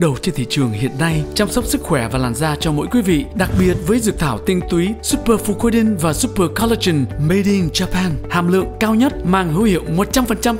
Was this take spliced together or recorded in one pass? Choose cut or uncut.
uncut